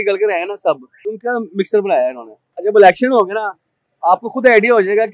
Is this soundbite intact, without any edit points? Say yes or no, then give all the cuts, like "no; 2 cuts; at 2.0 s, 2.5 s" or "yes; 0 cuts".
no; 2 cuts; at 1.1 s, 2.6 s